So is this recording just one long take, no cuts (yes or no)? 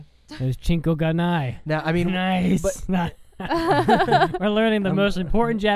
yes